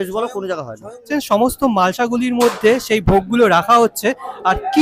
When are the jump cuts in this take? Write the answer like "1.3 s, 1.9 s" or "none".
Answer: 1.0 s